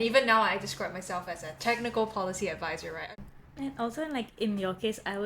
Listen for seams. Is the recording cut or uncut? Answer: cut